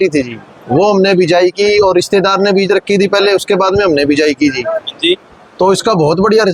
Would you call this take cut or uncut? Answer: uncut